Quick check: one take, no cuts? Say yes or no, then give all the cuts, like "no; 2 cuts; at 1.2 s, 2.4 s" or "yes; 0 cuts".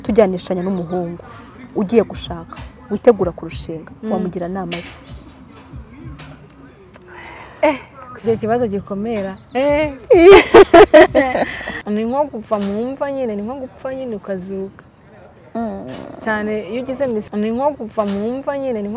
no; 2 cuts; at 11.8 s, 17.3 s